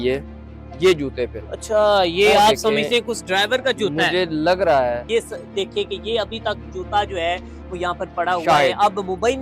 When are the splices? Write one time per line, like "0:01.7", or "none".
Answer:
0:01.5
0:05.0